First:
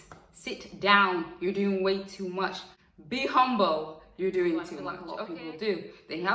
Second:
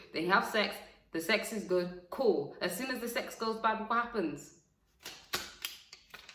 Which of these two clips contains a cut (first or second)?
first